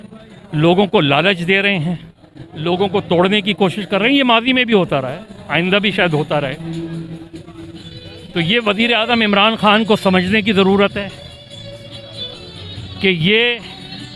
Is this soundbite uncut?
yes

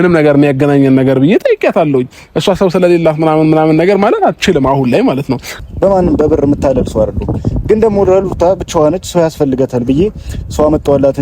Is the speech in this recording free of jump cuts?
no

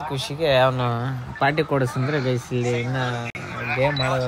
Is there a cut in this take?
no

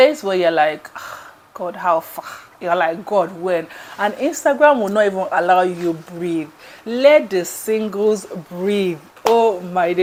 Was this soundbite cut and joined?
no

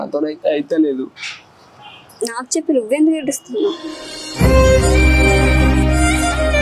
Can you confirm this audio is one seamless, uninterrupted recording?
yes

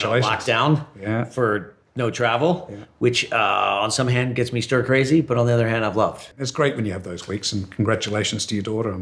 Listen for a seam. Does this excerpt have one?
yes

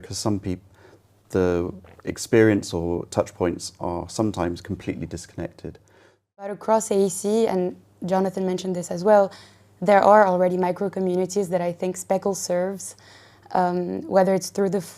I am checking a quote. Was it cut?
yes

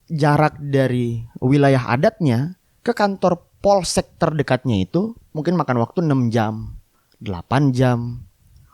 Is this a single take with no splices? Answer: yes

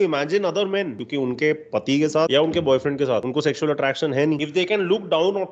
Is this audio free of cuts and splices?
no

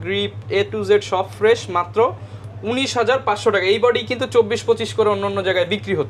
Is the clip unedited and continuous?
yes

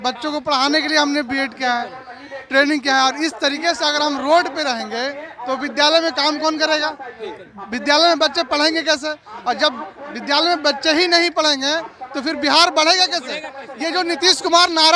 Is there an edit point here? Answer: no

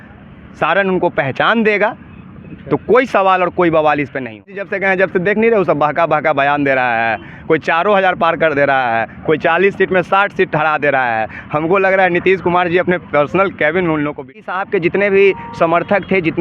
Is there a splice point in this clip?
yes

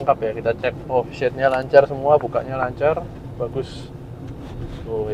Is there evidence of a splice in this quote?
no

